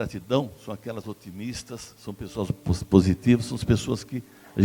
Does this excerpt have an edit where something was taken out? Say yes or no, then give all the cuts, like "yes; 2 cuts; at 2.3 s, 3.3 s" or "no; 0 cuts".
no; 0 cuts